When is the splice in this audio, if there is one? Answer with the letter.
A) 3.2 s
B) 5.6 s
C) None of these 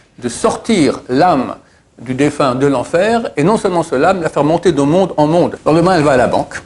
B